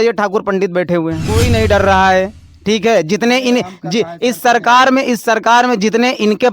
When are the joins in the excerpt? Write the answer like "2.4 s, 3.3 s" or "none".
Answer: 1.3 s